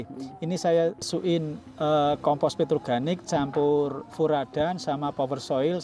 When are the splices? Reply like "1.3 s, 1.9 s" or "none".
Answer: 1.1 s